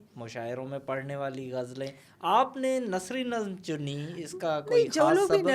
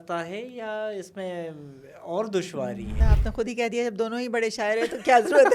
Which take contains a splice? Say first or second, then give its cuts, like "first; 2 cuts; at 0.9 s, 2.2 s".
second; 1 cut; at 2.9 s